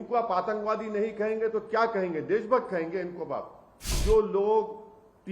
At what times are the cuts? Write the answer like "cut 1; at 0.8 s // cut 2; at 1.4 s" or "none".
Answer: cut 1; at 4.0 s